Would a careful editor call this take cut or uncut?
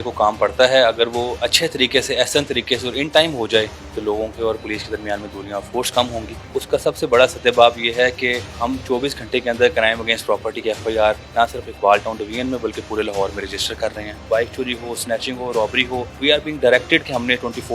cut